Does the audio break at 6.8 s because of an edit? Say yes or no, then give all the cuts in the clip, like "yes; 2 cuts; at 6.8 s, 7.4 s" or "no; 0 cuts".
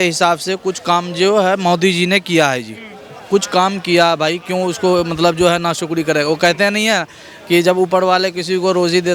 no; 0 cuts